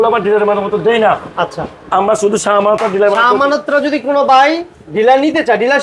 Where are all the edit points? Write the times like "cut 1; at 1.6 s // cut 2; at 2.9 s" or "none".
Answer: none